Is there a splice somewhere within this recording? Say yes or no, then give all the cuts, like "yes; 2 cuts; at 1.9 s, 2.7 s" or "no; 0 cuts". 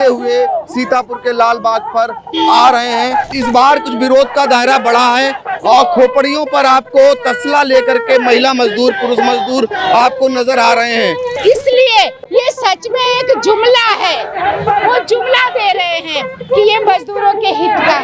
yes; 2 cuts; at 3.3 s, 11.4 s